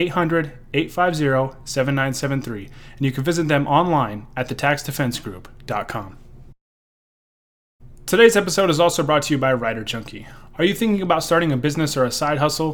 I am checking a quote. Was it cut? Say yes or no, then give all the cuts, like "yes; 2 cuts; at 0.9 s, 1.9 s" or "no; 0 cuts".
no; 0 cuts